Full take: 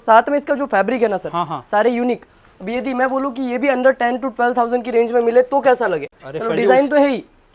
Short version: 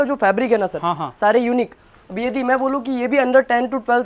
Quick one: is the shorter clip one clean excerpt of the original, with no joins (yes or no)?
yes